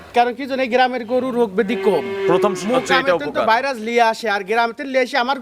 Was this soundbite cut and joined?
no; 0 cuts

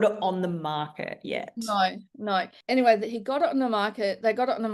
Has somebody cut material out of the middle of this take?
yes; 1 cut; at 2.6 s

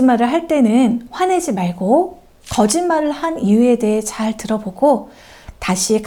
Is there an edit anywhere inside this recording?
no; 0 cuts

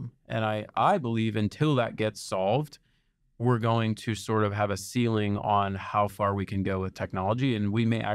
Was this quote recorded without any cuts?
yes; 0 cuts

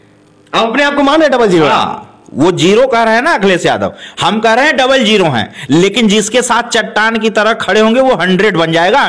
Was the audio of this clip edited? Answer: no; 0 cuts

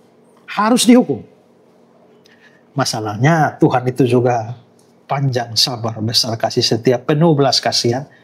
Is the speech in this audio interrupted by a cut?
no; 0 cuts

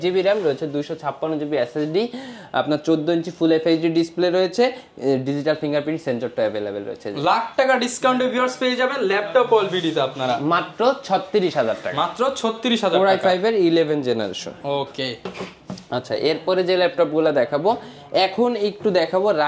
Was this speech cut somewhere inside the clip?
no; 0 cuts

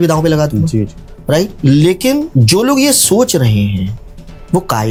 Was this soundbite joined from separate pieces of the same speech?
no; 0 cuts

